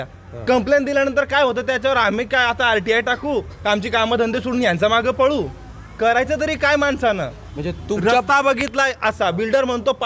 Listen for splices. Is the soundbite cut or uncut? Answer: uncut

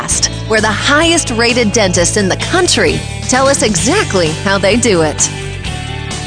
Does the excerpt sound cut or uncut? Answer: uncut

